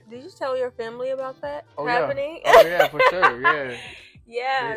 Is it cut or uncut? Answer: uncut